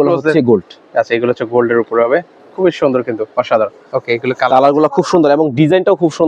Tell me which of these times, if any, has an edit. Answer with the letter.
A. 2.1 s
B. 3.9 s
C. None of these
B